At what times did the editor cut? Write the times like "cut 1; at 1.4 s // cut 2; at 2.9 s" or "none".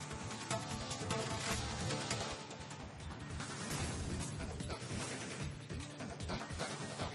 none